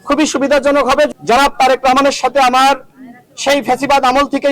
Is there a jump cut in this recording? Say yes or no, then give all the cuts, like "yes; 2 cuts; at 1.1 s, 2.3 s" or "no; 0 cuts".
yes; 1 cut; at 1.1 s